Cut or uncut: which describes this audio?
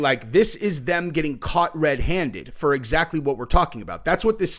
uncut